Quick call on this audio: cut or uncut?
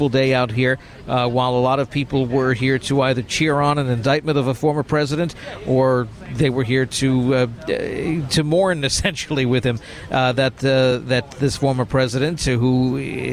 uncut